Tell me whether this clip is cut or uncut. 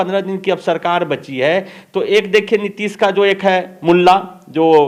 uncut